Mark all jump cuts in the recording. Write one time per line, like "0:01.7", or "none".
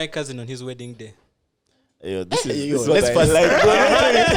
none